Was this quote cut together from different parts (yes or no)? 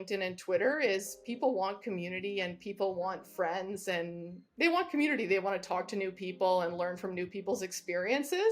no